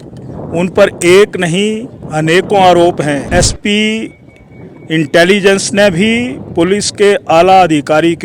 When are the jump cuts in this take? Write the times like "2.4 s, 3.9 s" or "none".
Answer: 3.3 s